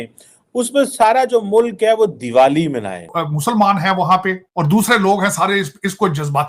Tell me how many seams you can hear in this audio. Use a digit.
2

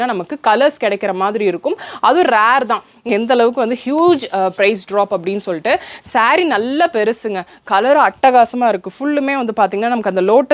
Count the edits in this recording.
1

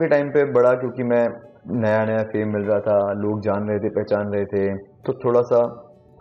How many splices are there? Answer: 2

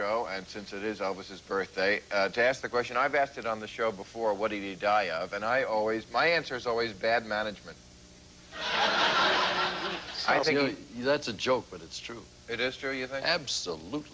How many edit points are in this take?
0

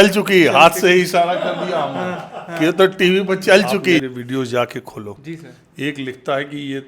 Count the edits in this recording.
1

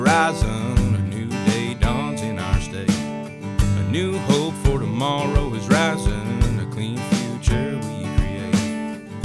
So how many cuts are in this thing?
0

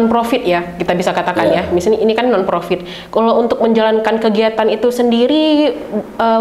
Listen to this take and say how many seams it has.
0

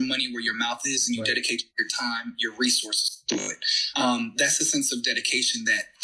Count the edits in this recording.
1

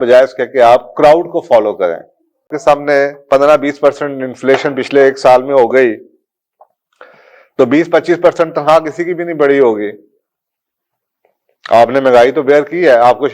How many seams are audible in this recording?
1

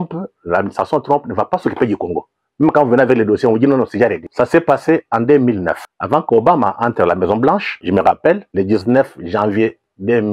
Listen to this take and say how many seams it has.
4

